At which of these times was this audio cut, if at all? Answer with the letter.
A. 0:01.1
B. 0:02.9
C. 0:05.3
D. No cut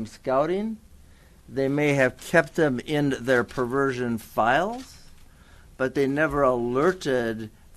D